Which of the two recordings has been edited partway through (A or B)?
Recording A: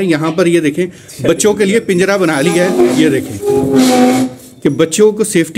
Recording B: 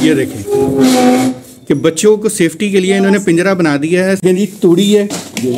B